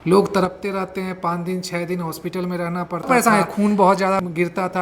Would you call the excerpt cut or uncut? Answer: cut